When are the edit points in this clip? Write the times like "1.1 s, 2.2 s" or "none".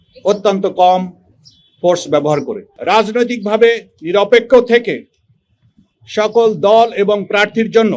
2.6 s